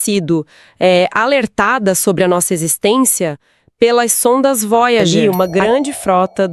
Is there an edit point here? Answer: yes; 1 cut; at 5.1 s

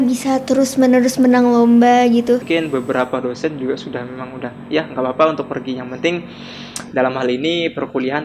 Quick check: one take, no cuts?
no; 1 cut; at 2.4 s

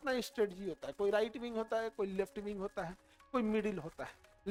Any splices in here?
no; 0 cuts

